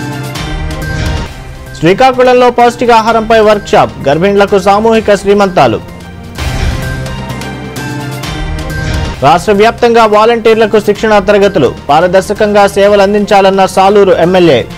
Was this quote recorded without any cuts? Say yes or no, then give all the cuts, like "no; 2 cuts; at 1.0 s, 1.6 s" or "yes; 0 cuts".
no; 1 cut; at 1.1 s